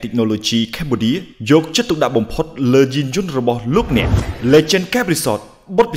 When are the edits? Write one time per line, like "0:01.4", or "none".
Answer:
0:04.2